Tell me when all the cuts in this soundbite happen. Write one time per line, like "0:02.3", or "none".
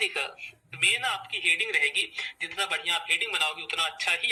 none